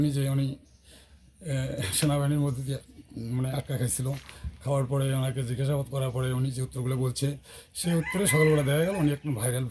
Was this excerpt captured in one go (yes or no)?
yes